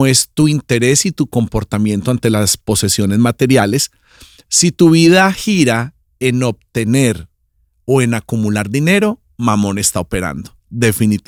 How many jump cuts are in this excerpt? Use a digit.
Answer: 0